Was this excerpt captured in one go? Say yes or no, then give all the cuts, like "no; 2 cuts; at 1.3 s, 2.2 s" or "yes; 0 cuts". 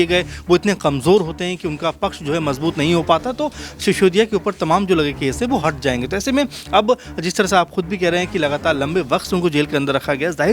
yes; 0 cuts